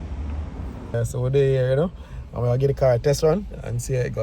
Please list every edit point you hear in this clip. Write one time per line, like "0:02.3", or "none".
0:00.9